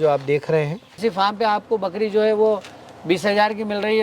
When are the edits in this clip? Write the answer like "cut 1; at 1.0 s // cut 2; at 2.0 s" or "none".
cut 1; at 0.9 s